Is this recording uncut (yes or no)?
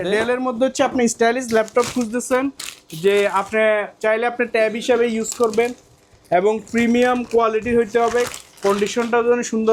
yes